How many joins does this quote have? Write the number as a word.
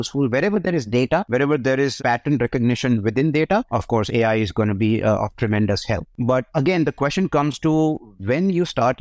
two